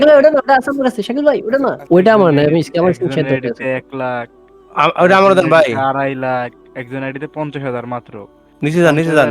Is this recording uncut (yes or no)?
no